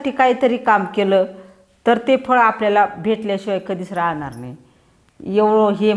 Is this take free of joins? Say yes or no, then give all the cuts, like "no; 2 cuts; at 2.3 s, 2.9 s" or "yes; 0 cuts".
yes; 0 cuts